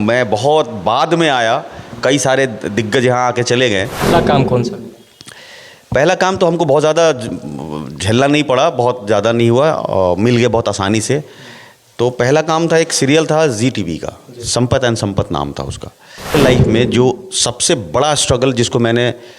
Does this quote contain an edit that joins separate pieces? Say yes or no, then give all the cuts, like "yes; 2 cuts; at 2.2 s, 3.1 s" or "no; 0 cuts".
yes; 2 cuts; at 4.0 s, 16.3 s